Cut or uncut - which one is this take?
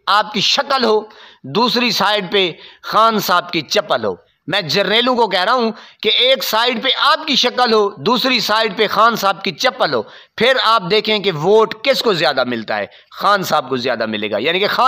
cut